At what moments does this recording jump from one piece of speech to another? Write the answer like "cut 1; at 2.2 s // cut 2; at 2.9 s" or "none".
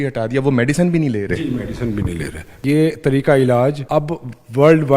cut 1; at 2.6 s // cut 2; at 3.8 s

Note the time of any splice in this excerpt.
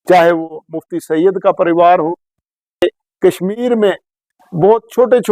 cut 1; at 2.8 s

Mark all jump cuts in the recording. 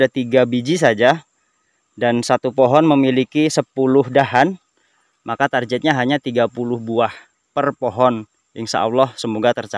none

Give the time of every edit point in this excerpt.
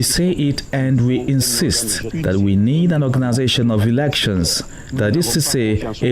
cut 1; at 2.1 s

